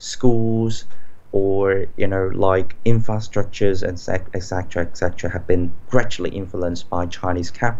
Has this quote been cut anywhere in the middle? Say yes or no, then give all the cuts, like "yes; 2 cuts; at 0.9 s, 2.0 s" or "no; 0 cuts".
no; 0 cuts